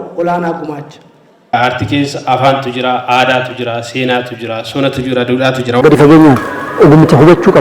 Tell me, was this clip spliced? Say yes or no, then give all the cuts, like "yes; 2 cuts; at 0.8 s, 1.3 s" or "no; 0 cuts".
yes; 2 cuts; at 1.5 s, 5.8 s